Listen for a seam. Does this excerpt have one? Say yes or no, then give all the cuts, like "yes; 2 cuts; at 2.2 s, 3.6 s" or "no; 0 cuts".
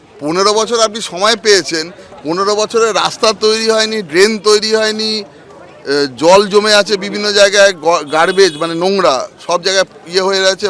no; 0 cuts